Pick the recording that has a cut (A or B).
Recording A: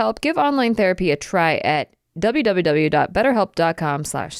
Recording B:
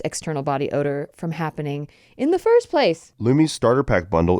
B